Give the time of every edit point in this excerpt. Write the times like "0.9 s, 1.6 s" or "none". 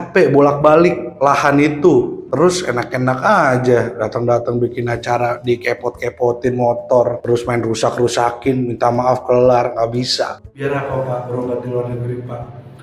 10.4 s